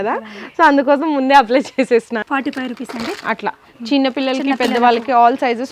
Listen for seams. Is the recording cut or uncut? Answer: cut